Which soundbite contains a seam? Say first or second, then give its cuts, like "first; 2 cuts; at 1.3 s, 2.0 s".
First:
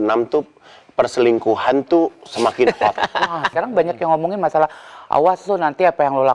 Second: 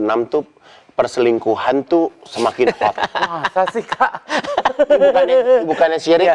first; 1 cut; at 3.5 s